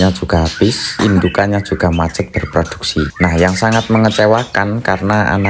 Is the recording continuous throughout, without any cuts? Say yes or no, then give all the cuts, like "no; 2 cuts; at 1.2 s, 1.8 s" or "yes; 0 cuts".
no; 2 cuts; at 1.0 s, 3.1 s